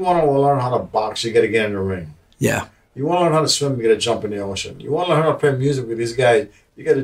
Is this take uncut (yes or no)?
yes